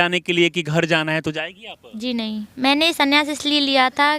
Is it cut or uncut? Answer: cut